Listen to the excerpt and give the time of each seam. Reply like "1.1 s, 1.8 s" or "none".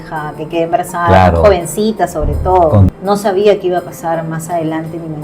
2.9 s